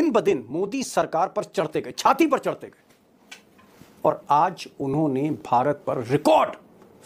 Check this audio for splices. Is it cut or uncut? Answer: uncut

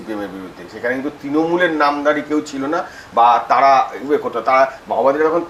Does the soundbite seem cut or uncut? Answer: uncut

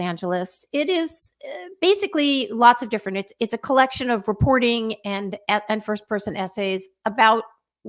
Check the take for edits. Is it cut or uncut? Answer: uncut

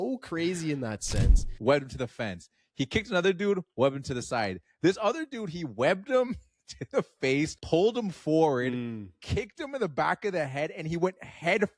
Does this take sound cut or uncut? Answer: cut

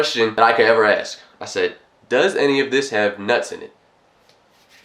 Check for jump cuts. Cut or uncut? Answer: uncut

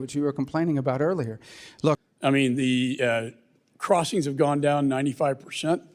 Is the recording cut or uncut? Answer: cut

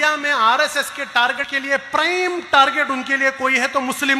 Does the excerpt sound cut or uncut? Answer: cut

